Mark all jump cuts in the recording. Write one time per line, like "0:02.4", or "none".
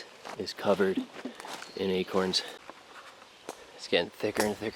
0:02.6

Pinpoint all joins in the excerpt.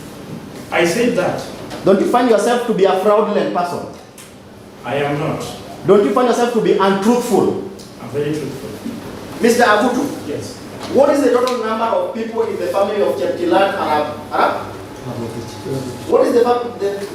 0:09.2

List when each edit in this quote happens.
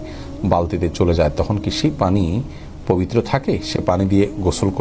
none

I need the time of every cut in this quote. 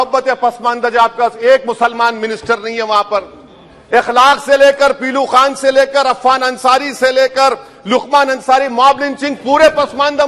none

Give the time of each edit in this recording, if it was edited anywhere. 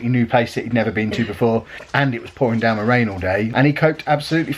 0:01.8
0:03.5

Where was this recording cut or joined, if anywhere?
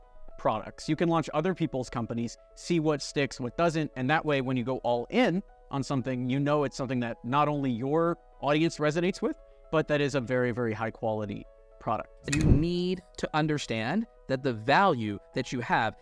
0:12.1

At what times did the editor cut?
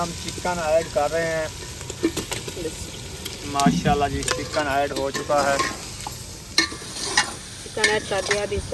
none

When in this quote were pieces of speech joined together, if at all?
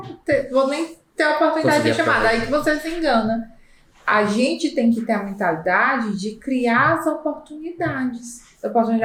none

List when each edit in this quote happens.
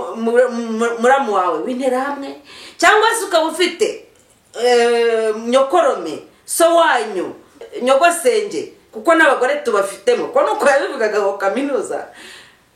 0:07.7

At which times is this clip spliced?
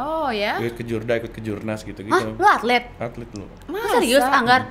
none

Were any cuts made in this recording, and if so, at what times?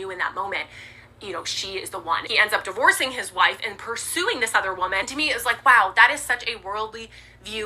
0:02.3
0:05.1

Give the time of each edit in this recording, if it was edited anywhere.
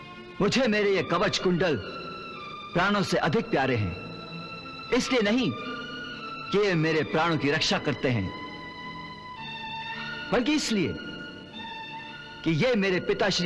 none

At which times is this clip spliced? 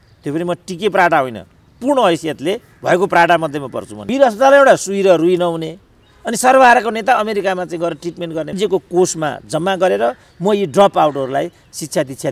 0:03.9
0:08.6

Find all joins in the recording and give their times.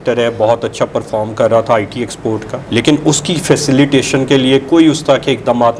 none

